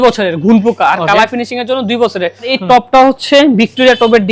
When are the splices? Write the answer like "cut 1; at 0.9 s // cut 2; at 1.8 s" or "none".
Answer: cut 1; at 2.5 s